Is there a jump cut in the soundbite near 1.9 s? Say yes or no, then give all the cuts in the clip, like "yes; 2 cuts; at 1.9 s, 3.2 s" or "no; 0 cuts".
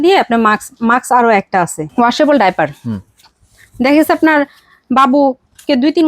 yes; 1 cut; at 1.9 s